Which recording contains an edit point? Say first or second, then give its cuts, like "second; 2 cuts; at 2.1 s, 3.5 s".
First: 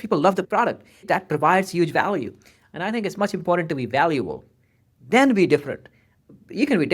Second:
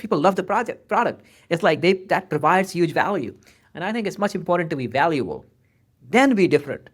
first; 1 cut; at 0.9 s